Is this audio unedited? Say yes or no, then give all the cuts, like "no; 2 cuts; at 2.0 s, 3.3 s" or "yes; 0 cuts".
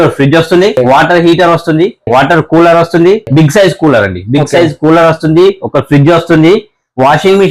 no; 3 cuts; at 0.8 s, 2.0 s, 3.3 s